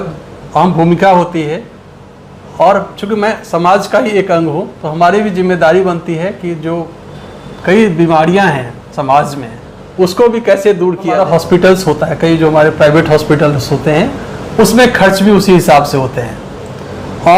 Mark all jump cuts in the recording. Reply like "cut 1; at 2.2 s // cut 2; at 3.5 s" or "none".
cut 1; at 11.2 s